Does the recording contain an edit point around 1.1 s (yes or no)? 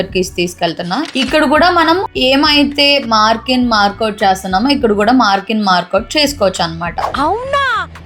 no